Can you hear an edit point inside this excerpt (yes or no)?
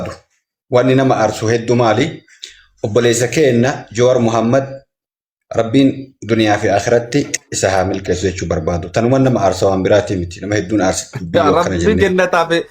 no